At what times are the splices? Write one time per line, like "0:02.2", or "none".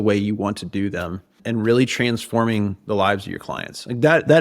0:01.4